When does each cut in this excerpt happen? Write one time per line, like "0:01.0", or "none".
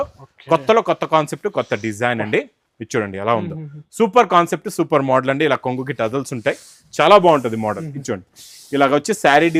none